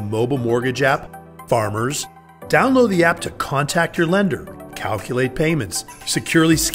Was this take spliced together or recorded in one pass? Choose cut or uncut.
uncut